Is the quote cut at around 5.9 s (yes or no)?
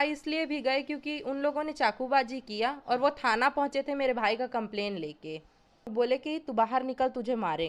yes